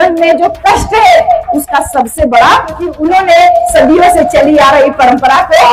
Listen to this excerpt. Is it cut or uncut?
cut